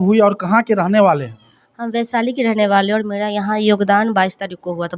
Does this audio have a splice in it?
no; 0 cuts

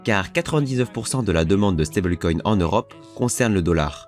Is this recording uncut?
yes; 0 cuts

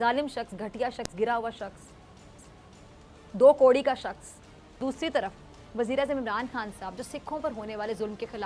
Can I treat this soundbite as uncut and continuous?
yes; 0 cuts

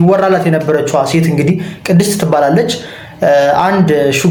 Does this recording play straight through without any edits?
yes; 0 cuts

